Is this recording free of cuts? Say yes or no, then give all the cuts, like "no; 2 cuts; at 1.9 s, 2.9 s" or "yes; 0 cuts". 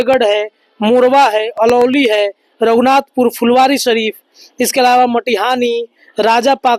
yes; 0 cuts